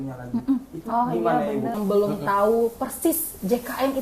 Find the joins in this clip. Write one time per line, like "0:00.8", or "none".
0:01.8